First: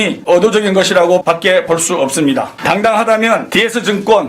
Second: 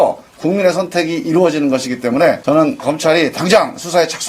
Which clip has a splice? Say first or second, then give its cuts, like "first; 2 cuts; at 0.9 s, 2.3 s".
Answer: first; 1 cut; at 1.2 s